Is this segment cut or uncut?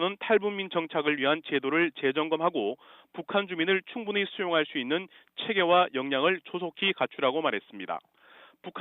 uncut